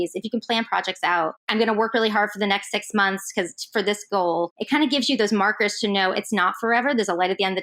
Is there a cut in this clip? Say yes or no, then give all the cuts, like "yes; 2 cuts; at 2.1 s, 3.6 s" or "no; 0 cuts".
no; 0 cuts